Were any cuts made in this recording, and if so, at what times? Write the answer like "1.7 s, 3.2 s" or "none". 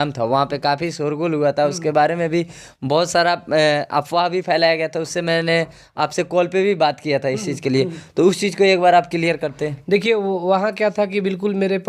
none